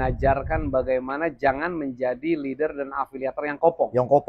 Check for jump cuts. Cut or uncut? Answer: uncut